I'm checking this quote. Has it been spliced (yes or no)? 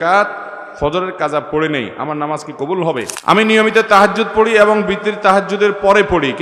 yes